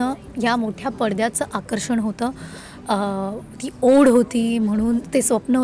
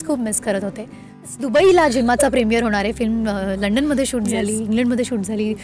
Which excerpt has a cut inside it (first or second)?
second